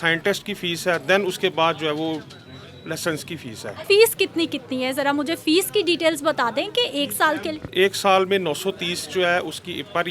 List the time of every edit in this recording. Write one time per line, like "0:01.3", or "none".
0:03.8

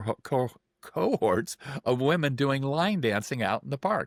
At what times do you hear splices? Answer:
none

